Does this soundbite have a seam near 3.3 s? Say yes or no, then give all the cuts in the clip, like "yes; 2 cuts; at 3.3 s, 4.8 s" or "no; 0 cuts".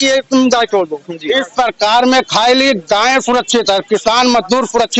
no; 1 cut; at 1.1 s